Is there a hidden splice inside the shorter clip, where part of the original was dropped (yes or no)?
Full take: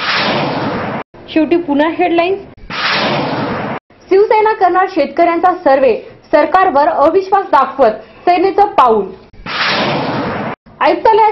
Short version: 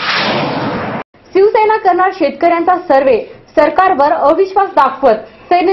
yes